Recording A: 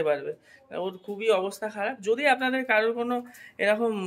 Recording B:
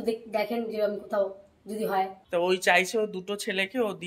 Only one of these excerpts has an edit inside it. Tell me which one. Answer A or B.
B